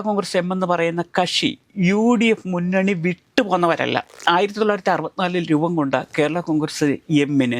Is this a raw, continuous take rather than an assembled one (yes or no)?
no